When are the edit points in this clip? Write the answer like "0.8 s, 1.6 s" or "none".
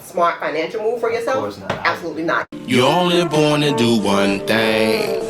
2.5 s